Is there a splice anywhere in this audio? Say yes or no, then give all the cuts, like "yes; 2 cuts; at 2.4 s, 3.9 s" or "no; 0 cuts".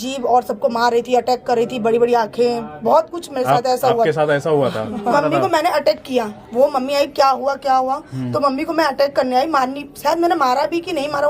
yes; 1 cut; at 5.1 s